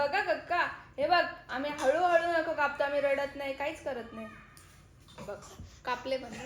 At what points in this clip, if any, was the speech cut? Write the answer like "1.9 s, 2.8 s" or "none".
none